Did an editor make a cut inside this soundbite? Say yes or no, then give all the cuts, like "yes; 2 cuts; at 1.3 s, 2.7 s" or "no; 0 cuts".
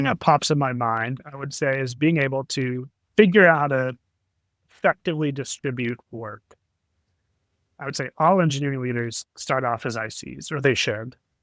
yes; 2 cuts; at 1.2 s, 7.7 s